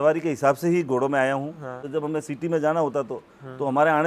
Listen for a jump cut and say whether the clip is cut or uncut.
cut